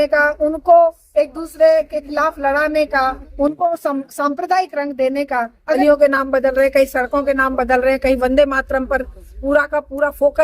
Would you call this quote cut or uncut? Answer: cut